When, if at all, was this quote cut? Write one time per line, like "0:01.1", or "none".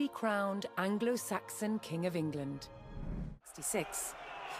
0:03.5